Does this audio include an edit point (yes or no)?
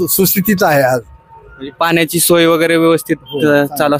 no